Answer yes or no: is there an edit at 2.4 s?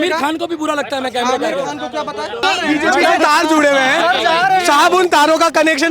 yes